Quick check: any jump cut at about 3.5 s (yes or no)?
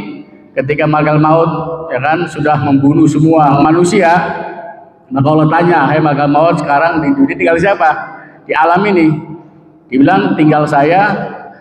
yes